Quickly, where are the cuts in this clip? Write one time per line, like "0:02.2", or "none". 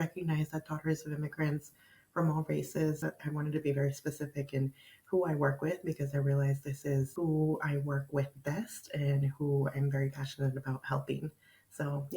0:03.0
0:07.1